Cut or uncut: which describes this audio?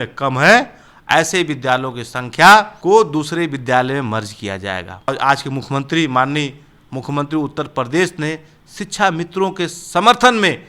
cut